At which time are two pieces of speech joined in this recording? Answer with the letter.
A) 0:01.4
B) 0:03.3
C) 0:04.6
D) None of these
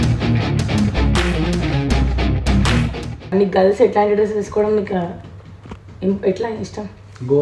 B